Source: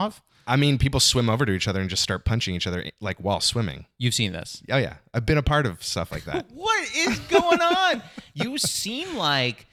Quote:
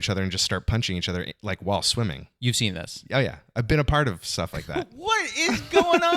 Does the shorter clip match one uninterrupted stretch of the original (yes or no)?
yes